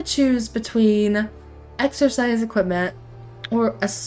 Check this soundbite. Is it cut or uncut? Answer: uncut